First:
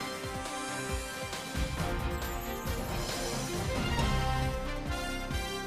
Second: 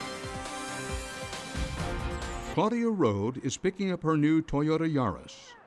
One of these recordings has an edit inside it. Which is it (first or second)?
first